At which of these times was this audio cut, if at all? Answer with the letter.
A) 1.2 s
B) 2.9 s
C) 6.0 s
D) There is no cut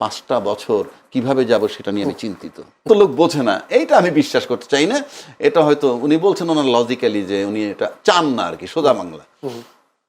B